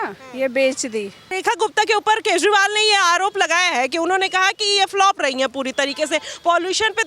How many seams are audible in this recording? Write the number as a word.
one